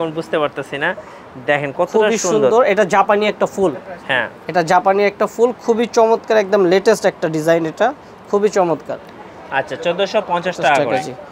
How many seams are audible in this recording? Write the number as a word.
zero